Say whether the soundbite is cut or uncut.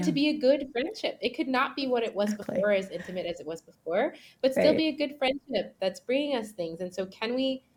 uncut